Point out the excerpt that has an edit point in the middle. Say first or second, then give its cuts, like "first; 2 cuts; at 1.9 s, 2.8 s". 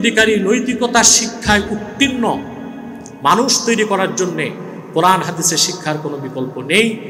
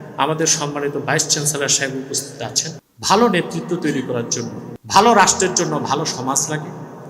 second; 2 cuts; at 2.9 s, 4.7 s